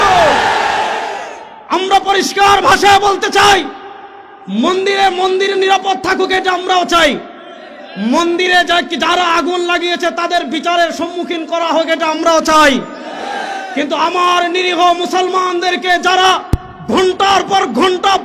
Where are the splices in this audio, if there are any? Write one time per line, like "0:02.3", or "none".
none